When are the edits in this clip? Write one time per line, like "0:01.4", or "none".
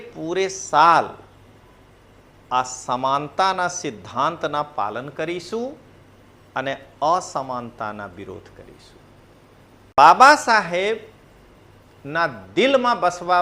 0:10.0